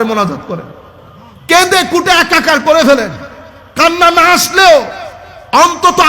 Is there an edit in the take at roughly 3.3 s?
no; 0 cuts

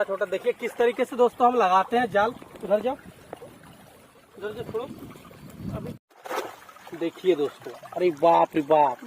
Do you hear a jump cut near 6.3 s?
yes; 1 cut; at 6.3 s

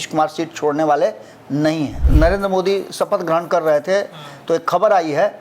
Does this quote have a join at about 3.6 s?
no; 1 cut; at 2.0 s

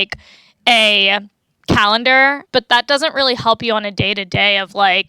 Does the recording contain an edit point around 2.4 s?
yes; 2 cuts; at 1.4 s, 2.4 s

